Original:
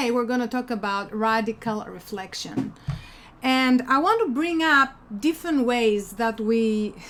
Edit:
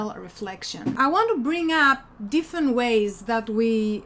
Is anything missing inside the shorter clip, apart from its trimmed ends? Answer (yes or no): yes